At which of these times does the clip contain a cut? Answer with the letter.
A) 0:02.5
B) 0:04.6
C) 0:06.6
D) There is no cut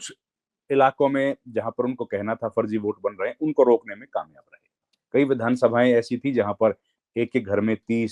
D